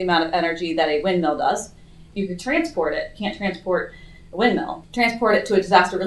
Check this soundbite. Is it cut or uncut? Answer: cut